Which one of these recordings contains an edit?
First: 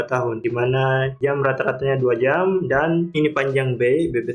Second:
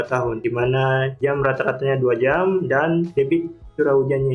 first; 1 cut; at 3.1 s

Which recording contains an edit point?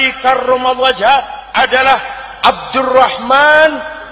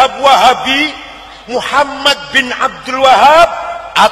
first; 1 cut; at 1.4 s

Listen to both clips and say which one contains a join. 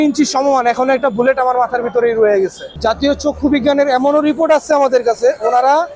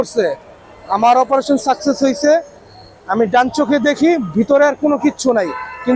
first; 1 cut; at 2.7 s

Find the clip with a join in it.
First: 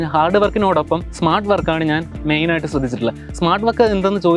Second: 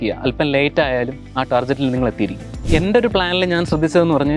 second; 1 cut; at 2.6 s

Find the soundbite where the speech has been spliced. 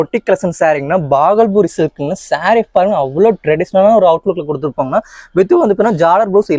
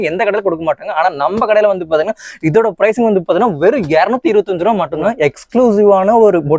second; 1 cut; at 5.0 s

